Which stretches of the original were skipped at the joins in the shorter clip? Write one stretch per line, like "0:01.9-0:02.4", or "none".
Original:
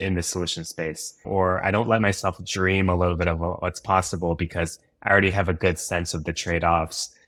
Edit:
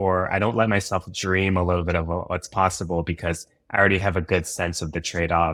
none